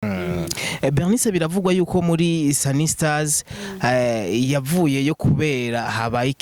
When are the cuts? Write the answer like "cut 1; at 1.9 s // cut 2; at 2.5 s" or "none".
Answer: none